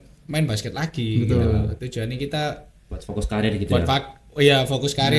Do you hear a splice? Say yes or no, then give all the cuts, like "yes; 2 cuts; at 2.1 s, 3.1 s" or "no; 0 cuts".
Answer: no; 0 cuts